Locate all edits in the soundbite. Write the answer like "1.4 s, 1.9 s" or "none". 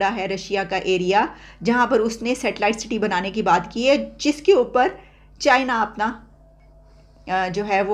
none